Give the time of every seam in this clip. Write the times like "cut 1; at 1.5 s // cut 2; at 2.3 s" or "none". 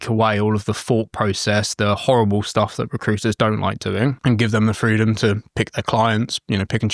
cut 1; at 4.2 s